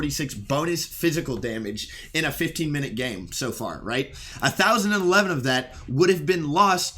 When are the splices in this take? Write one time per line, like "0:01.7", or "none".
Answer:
0:04.2